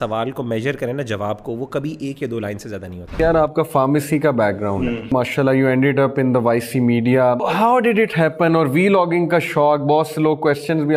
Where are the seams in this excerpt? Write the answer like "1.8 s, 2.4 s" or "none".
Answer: 3.1 s, 5.1 s, 7.4 s